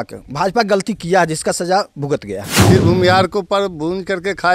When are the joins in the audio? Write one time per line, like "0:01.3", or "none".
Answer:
0:02.5